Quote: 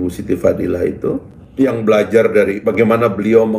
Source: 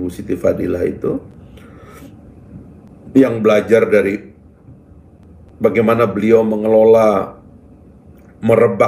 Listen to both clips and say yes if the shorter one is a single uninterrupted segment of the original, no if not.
no